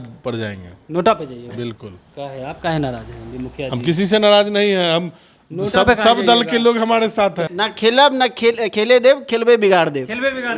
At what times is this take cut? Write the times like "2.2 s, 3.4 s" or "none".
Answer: 7.5 s

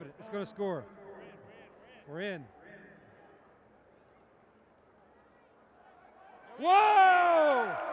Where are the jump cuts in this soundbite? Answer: none

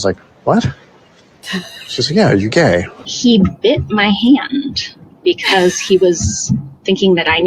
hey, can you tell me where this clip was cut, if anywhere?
3.0 s

